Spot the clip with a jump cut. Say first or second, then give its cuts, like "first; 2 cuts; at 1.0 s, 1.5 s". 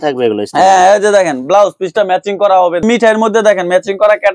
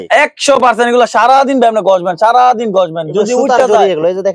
first; 1 cut; at 2.8 s